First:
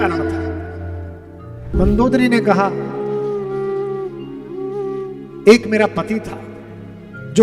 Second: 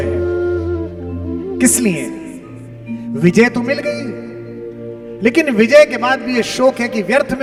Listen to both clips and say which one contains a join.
first; 1 cut; at 1.7 s

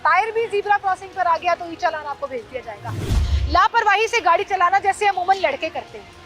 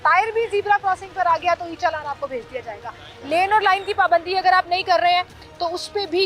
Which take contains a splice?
first; 1 cut; at 3.1 s

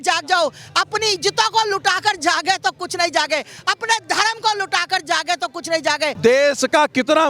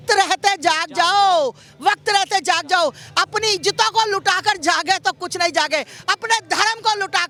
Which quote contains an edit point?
first; 1 cut; at 6.1 s

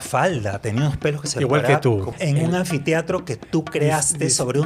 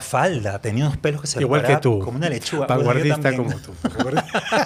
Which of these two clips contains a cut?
first; 1 cut; at 2.1 s

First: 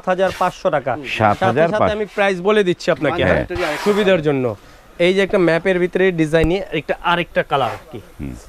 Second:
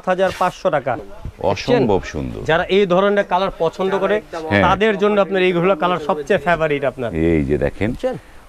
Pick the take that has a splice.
second; 1 cut; at 1.1 s

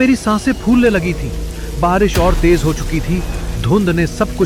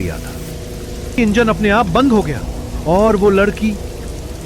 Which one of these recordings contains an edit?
second; 1 cut; at 1.2 s

